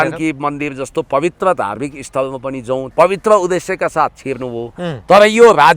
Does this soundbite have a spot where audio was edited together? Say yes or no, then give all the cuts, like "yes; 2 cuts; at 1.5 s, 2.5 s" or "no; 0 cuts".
yes; 1 cut; at 2.9 s